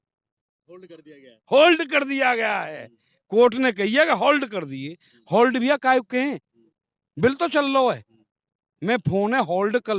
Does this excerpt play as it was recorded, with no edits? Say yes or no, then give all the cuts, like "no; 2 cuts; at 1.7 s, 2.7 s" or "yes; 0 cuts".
yes; 0 cuts